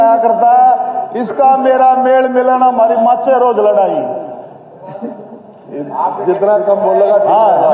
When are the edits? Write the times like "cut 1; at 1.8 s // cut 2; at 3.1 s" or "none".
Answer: none